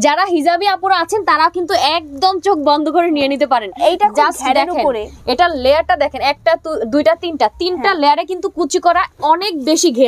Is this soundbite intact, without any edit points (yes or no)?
yes